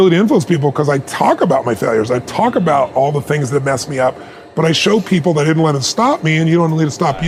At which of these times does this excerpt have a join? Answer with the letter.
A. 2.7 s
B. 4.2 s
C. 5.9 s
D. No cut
D